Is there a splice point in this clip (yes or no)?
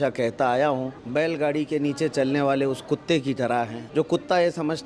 yes